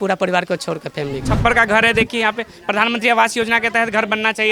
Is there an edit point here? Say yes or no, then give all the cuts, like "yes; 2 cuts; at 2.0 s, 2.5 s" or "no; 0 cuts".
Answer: yes; 1 cut; at 1.2 s